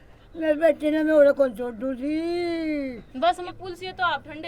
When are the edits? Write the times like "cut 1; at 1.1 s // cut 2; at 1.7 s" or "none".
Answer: cut 1; at 3.4 s